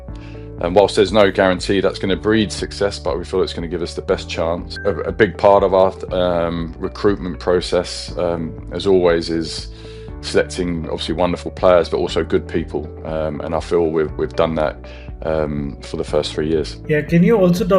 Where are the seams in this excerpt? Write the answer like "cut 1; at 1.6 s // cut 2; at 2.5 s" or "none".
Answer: none